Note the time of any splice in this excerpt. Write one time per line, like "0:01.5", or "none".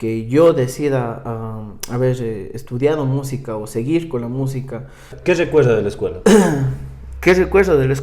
0:05.1